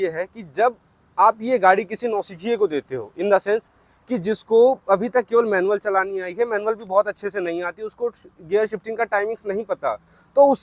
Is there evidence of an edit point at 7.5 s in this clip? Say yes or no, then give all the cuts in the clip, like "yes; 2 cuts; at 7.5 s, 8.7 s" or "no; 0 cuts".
no; 0 cuts